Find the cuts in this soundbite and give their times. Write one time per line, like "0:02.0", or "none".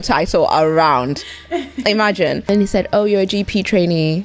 0:02.5